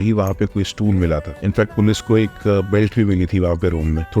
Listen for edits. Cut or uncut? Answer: cut